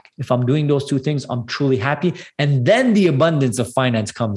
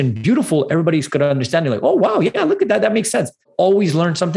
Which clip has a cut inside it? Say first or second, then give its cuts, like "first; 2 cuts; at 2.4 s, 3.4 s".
second; 1 cut; at 3.4 s